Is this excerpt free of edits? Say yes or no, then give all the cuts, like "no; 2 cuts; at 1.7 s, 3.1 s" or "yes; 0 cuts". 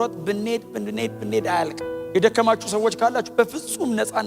no; 1 cut; at 2.0 s